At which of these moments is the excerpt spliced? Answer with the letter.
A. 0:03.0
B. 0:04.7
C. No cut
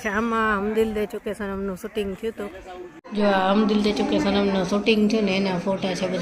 A